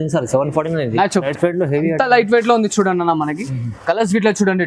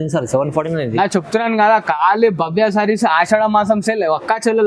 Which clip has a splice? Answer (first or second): first